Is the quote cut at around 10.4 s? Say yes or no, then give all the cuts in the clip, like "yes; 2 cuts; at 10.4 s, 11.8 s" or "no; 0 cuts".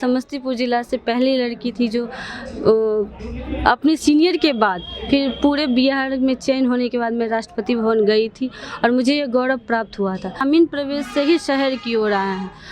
yes; 1 cut; at 10.4 s